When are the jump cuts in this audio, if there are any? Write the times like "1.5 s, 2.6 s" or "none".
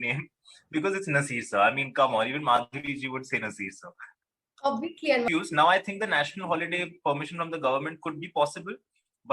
5.3 s